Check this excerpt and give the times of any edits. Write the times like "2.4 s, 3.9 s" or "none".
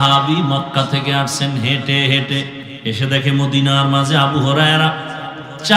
2.6 s